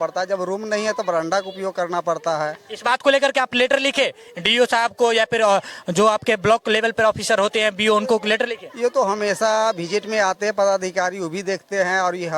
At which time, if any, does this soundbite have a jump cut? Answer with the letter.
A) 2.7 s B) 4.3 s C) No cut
C